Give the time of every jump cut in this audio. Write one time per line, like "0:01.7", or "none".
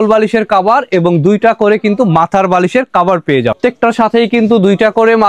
0:03.6